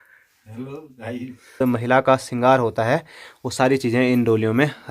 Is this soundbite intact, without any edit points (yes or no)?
no